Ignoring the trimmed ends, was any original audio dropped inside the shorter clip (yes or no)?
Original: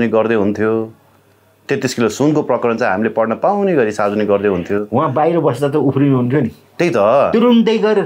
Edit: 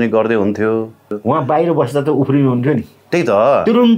yes